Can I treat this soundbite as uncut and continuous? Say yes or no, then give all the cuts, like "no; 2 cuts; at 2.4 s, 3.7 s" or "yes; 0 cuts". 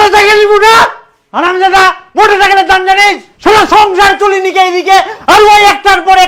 yes; 0 cuts